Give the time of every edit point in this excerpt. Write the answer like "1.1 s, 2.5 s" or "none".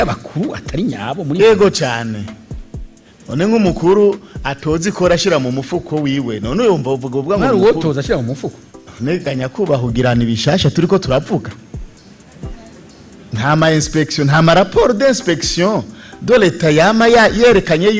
none